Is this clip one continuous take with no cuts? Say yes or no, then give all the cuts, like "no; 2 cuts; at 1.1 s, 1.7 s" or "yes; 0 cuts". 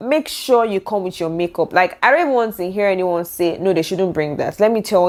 yes; 0 cuts